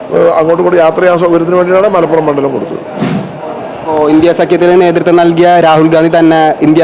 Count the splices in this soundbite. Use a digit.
0